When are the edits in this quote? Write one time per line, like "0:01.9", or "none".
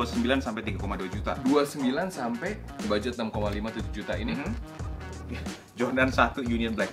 0:02.9